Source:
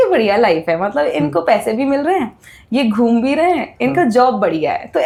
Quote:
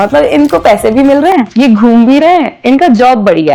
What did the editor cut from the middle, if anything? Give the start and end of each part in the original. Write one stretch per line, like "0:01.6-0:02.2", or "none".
0:02.3-0:02.6